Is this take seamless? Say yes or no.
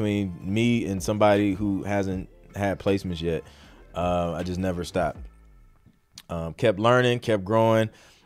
yes